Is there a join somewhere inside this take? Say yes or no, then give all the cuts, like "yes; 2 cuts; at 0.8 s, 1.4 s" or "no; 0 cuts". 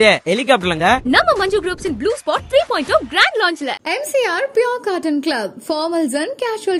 no; 0 cuts